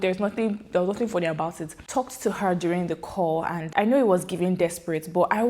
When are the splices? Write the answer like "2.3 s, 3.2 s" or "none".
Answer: 1.9 s, 3.6 s